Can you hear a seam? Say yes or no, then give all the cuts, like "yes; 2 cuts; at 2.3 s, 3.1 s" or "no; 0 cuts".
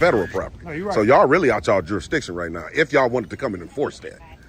no; 0 cuts